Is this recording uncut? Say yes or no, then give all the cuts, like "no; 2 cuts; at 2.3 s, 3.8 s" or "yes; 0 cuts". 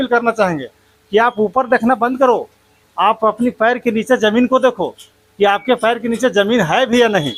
yes; 0 cuts